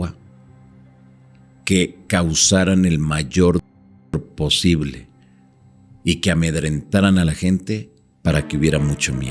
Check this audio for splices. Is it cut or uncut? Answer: uncut